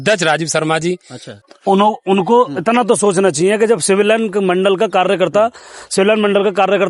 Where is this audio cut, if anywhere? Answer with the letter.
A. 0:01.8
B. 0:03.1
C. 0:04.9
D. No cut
A